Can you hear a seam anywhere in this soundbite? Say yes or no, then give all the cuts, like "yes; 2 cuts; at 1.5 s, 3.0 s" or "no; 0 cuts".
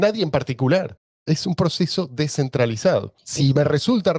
yes; 2 cuts; at 1.2 s, 3.2 s